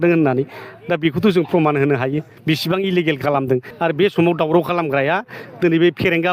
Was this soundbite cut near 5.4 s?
no; 2 cuts; at 2.3 s, 3.7 s

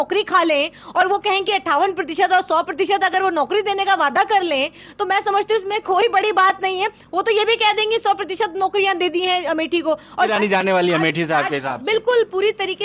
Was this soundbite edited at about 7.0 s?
no; 1 cut; at 10.3 s

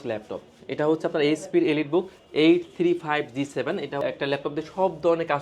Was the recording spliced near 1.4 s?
no; 1 cut; at 4.0 s

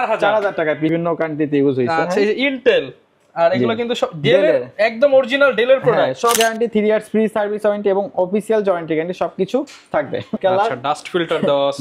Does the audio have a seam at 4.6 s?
no; 3 cuts; at 0.9 s, 6.4 s, 10.4 s

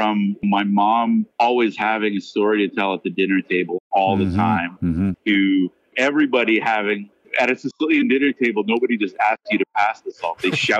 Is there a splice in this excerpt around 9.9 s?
no; 1 cut; at 1.3 s

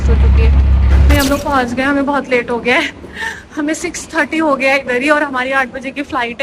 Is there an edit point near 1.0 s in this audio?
yes; 1 cut; at 1.0 s

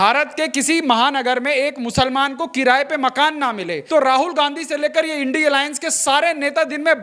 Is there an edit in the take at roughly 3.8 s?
yes; 1 cut; at 3.8 s

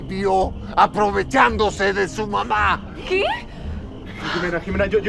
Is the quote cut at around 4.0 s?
no; 0 cuts

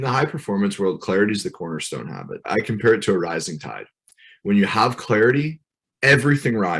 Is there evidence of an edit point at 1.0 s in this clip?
no; 1 cut; at 2.4 s

